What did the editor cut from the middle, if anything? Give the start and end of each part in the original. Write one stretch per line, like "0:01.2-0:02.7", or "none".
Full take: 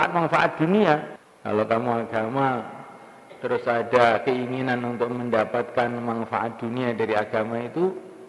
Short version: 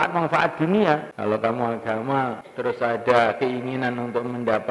0:01.1-0:01.4
0:02.7-0:03.3